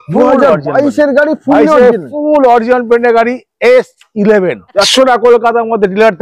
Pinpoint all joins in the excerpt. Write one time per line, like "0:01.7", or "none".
0:04.9